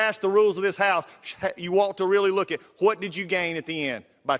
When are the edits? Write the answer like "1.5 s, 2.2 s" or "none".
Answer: none